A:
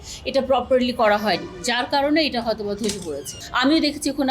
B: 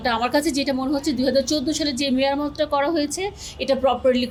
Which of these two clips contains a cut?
A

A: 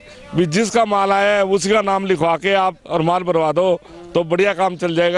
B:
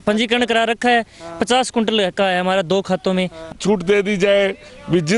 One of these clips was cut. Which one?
B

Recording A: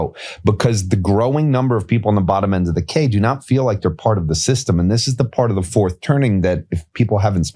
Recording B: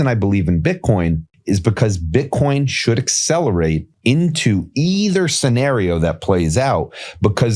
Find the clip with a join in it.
B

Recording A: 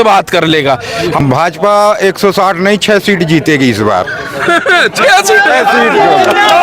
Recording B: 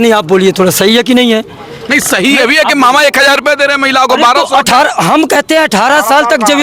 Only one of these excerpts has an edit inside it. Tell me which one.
A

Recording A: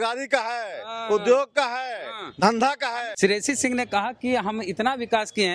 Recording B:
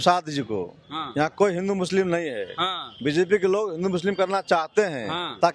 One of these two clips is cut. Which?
A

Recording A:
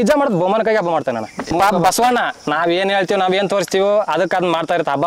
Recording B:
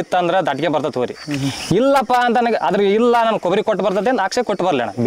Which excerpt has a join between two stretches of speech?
A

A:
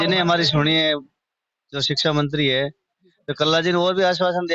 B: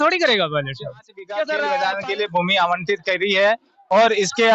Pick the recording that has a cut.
B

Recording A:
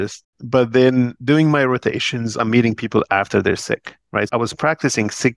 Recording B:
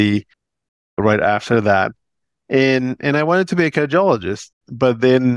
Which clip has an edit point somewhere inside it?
A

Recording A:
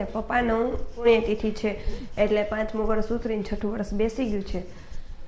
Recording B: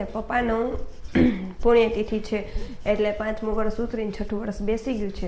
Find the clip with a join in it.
A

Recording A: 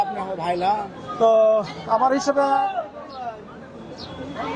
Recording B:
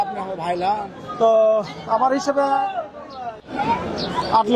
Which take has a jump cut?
B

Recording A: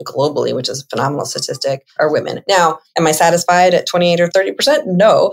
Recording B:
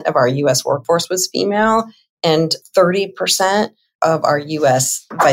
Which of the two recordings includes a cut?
A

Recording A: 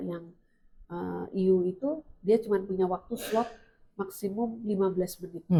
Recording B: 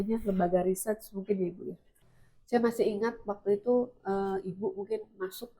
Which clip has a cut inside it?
B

